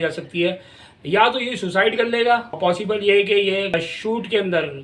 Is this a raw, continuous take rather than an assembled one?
no; 2 cuts; at 2.6 s, 3.7 s

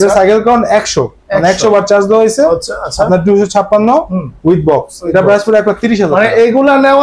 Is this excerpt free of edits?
yes; 0 cuts

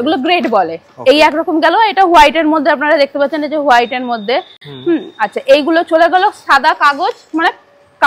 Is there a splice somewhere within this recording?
no; 0 cuts

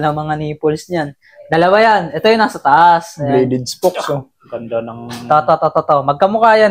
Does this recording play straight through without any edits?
yes; 0 cuts

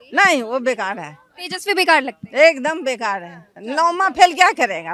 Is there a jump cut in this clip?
no; 0 cuts

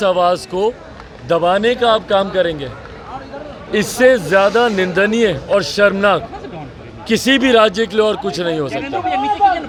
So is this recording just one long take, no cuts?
yes; 0 cuts

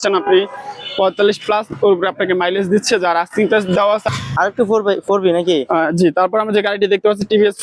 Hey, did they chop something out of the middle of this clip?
yes; 1 cut; at 4.1 s

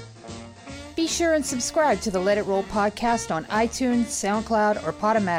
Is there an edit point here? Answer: yes; 1 cut; at 0.9 s

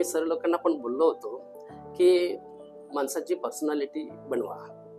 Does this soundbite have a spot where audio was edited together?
no; 0 cuts

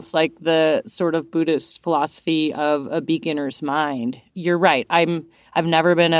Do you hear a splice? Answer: no; 0 cuts

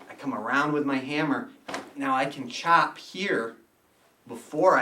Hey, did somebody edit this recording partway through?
no; 0 cuts

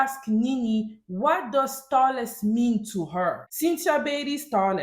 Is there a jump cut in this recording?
yes; 1 cut; at 3.5 s

